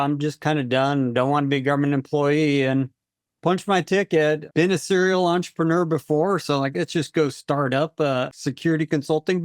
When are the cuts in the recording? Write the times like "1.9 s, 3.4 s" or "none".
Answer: 8.3 s